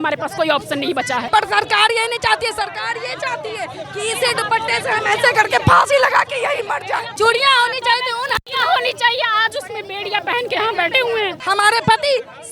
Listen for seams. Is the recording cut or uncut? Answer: cut